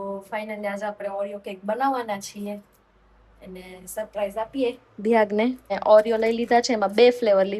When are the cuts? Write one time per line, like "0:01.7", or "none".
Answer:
0:05.8